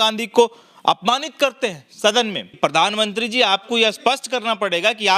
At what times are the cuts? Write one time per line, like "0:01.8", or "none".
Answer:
0:02.6